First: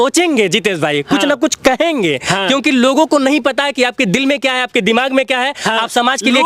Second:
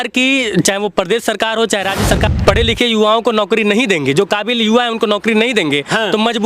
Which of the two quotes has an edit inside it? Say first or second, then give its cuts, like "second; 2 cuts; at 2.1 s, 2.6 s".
second; 1 cut; at 2.3 s